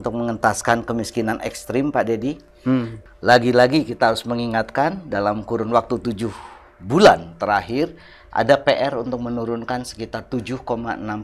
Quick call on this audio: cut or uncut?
cut